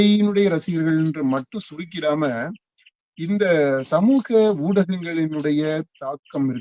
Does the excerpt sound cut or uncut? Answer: uncut